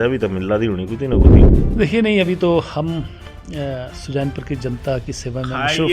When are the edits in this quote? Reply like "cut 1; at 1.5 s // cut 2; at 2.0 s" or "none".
cut 1; at 1.4 s